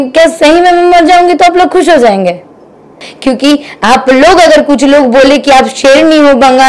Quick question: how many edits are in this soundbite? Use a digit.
1